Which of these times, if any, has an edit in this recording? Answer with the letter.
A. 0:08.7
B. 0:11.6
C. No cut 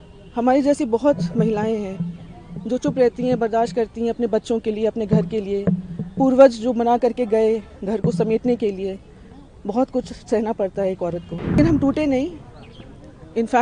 B